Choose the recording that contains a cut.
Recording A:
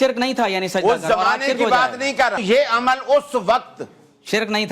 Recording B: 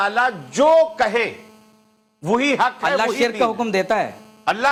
A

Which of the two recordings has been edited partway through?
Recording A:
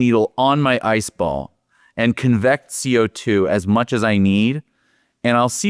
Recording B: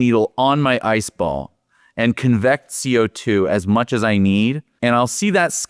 B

